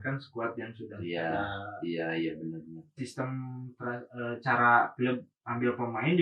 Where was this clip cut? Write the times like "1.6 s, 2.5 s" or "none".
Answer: 2.9 s